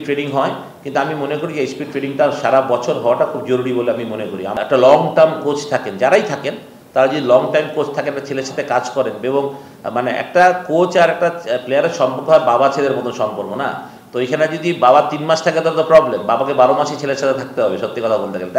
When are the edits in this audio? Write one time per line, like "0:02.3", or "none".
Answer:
none